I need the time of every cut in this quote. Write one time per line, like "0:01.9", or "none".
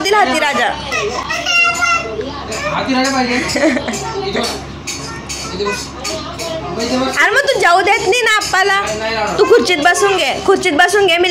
none